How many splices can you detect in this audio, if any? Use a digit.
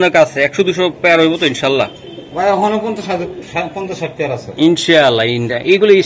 0